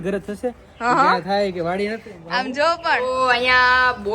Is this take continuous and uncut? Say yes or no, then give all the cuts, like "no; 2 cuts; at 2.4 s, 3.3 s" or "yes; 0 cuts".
no; 1 cut; at 3.0 s